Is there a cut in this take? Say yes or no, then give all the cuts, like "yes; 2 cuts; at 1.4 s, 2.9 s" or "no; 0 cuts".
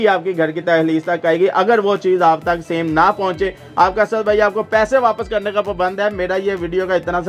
no; 0 cuts